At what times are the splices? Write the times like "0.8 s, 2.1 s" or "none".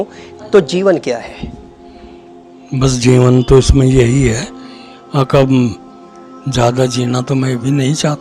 none